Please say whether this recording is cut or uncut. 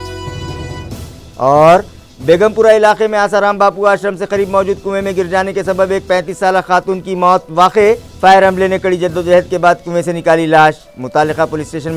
cut